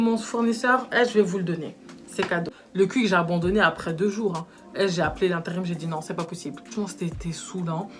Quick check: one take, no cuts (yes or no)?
no